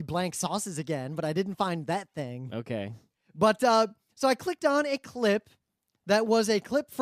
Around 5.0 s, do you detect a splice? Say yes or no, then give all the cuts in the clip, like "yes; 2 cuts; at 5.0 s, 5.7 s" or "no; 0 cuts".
no; 0 cuts